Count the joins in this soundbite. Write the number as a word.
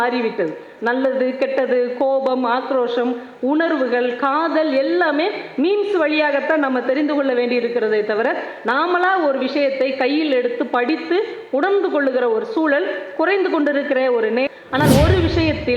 one